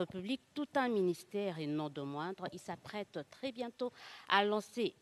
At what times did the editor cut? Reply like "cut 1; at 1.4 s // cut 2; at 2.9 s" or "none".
none